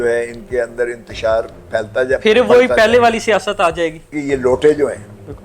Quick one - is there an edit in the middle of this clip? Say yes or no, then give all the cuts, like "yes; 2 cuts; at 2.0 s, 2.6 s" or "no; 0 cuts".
no; 0 cuts